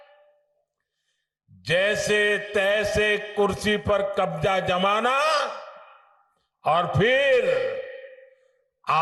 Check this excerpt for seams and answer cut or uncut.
uncut